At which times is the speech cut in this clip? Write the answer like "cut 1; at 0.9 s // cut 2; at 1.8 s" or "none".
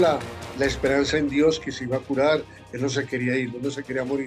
none